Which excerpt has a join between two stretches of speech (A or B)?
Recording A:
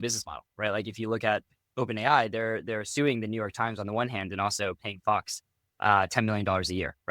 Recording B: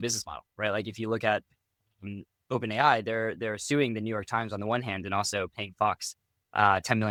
A